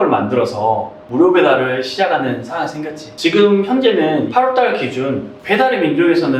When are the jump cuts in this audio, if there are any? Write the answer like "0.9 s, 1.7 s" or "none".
3.0 s